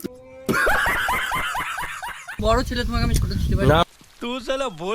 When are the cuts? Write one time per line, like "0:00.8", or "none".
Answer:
0:02.4